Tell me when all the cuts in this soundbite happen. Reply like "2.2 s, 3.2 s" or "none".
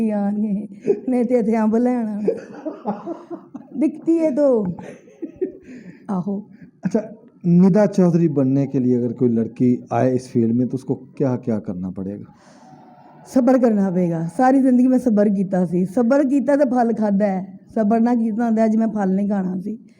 none